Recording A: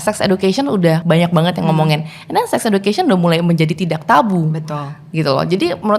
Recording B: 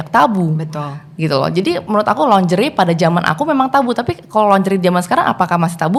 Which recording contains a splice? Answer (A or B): A